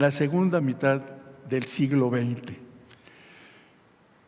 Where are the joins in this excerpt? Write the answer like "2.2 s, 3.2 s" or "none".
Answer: none

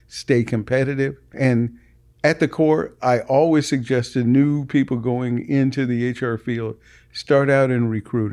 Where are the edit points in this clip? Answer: 1.3 s

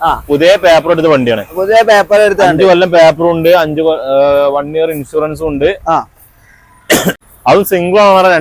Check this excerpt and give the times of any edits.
7.2 s

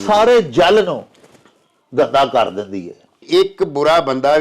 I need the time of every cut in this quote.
3.2 s

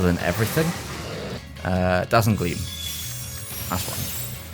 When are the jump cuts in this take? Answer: 1.4 s

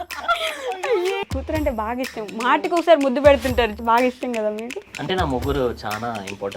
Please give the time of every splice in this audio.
1.2 s, 3.8 s

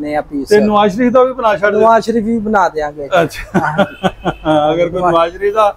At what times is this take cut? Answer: none

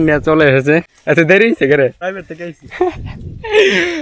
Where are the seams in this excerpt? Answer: 0.9 s, 2.0 s

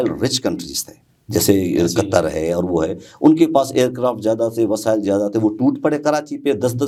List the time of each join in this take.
none

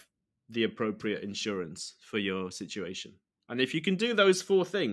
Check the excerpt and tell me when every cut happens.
none

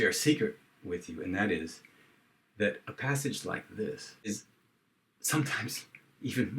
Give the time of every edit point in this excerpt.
4.3 s

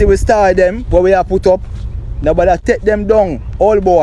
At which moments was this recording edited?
2.6 s

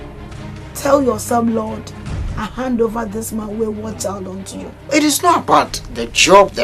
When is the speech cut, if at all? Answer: 4.7 s

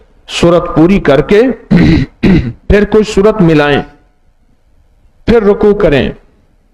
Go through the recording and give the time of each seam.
none

